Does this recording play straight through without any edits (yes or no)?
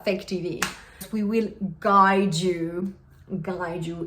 no